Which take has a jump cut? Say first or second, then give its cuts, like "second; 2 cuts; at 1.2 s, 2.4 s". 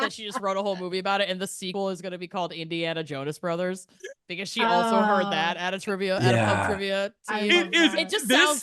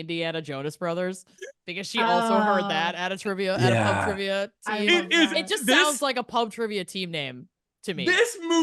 first; 1 cut; at 1.6 s